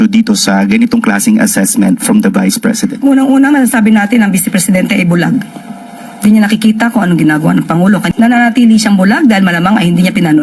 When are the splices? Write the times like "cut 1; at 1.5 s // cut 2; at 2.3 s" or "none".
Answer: cut 1; at 8.1 s